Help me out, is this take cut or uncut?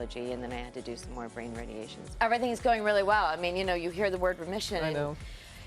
cut